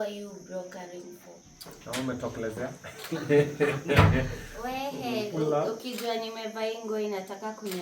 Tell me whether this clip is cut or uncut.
cut